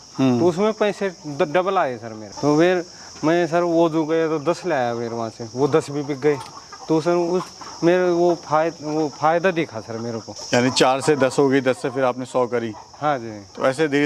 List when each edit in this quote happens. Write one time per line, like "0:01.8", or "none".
none